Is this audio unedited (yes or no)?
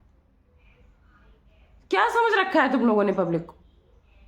yes